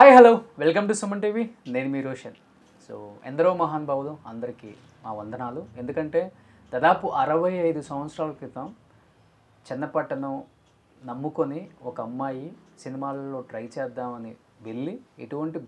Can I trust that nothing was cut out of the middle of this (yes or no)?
yes